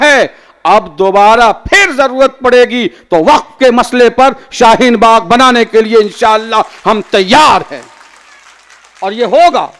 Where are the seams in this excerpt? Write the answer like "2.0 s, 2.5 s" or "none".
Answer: none